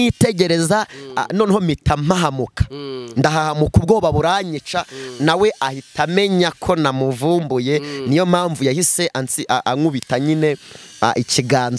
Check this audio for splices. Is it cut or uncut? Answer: uncut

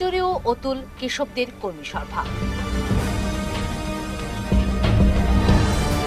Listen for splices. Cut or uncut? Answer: uncut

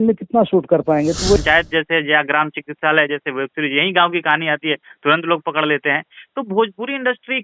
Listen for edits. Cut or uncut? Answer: cut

